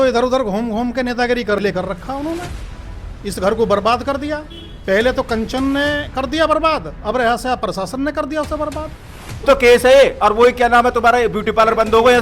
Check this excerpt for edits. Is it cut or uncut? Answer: cut